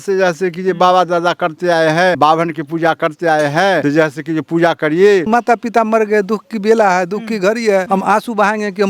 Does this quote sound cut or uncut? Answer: cut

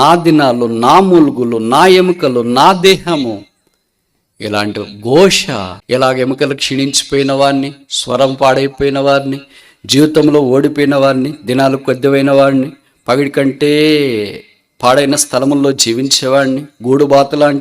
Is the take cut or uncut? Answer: cut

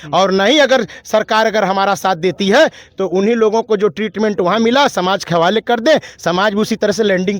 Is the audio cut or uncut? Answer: uncut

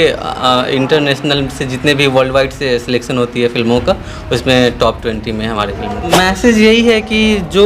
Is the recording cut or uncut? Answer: cut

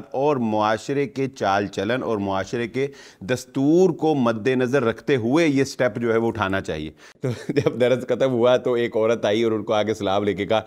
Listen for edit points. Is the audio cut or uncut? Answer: cut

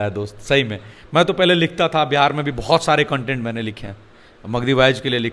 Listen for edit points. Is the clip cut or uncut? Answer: uncut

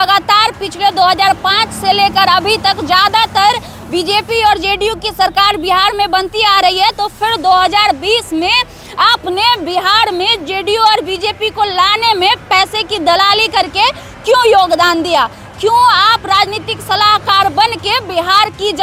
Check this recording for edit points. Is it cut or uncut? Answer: uncut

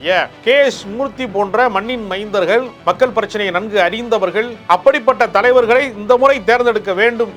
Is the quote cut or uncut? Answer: cut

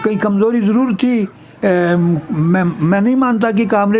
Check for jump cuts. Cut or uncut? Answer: cut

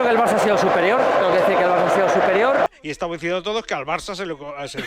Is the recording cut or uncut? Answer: cut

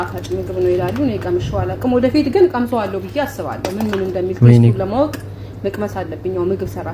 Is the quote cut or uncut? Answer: uncut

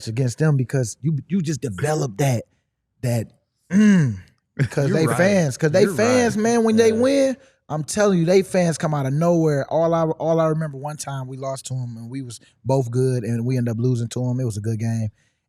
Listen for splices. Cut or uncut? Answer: uncut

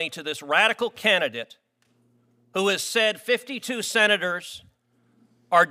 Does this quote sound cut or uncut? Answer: uncut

